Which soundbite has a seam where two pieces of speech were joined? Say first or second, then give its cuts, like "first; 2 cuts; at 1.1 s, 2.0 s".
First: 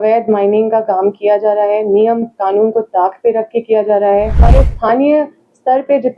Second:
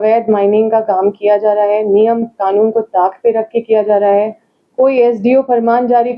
first; 1 cut; at 4.5 s